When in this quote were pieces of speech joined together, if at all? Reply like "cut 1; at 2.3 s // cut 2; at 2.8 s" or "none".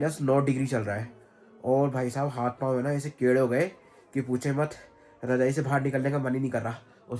none